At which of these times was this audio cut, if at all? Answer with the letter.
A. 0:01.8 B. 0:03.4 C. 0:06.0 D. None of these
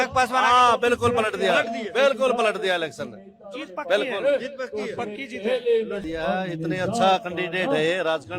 C